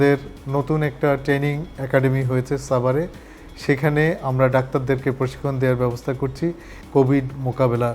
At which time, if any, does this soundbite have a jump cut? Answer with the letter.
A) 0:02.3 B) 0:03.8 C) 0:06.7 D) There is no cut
C